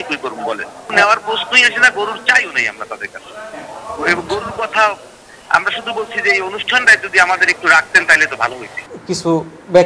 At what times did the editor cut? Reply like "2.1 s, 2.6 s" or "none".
8.9 s